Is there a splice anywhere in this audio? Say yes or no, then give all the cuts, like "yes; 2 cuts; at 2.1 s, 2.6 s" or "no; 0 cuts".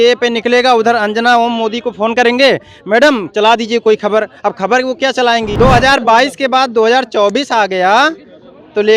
yes; 1 cut; at 5.5 s